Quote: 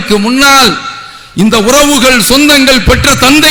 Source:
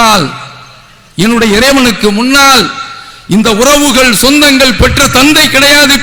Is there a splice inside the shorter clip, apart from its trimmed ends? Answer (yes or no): no